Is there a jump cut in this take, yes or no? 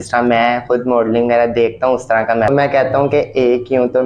yes